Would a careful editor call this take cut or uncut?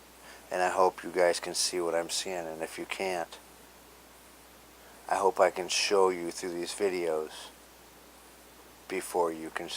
cut